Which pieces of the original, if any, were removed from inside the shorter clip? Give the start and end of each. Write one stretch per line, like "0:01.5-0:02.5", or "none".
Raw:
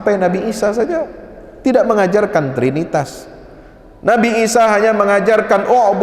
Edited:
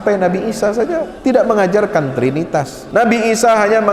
0:01.1-0:01.5
0:03.2-0:03.9